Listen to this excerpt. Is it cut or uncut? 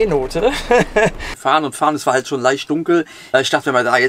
cut